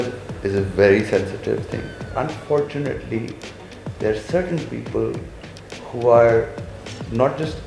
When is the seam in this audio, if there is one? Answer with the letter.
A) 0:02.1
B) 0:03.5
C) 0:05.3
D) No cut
A